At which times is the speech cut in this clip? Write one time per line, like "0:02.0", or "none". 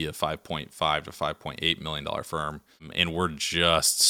0:02.9